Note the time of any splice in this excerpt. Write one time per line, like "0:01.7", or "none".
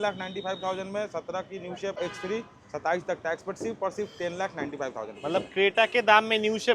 0:02.0